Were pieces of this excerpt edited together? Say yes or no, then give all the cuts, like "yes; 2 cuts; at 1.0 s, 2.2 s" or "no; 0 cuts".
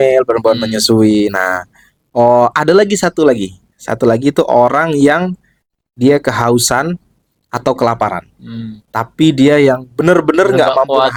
no; 0 cuts